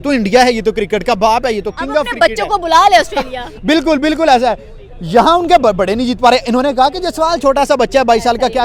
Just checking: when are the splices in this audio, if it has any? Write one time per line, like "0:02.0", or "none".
none

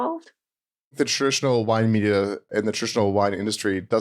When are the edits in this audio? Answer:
0:01.0
0:02.4

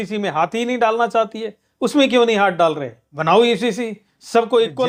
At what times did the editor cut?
none

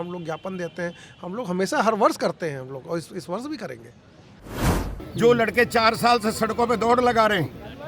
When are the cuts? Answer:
0:04.7

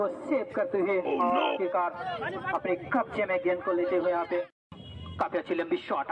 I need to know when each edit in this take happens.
0:04.6

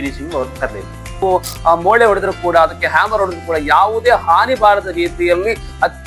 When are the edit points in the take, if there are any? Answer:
0:01.2

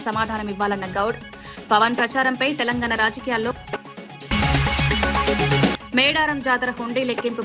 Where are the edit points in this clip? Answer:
0:03.5
0:05.7

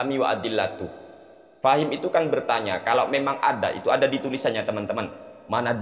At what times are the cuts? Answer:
none

